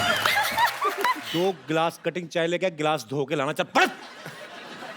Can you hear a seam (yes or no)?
yes